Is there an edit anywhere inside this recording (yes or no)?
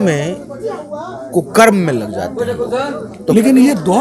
no